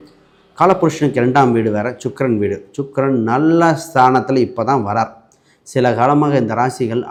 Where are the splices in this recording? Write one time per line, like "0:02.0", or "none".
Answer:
none